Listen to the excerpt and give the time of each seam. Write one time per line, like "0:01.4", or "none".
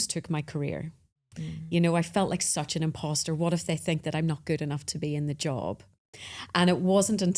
none